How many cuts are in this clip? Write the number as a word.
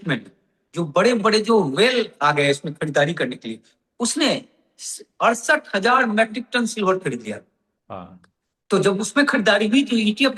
zero